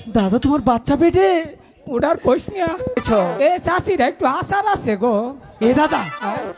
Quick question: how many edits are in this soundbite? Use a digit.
1